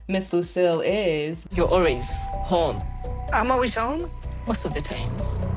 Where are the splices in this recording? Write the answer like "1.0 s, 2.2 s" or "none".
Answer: 1.4 s

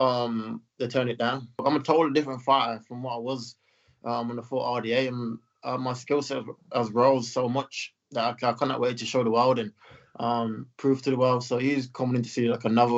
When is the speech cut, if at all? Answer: 1.6 s

